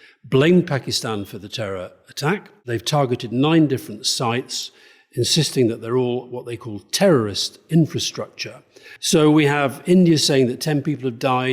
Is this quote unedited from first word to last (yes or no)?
no